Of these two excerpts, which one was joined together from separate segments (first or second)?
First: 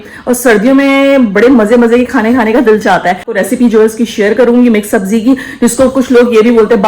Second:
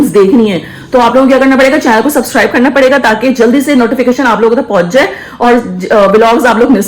first